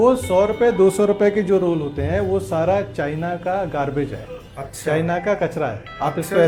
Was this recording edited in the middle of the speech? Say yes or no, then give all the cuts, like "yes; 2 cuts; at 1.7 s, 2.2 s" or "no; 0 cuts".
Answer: no; 0 cuts